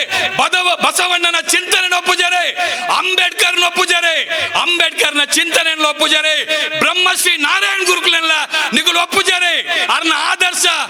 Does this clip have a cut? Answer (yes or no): no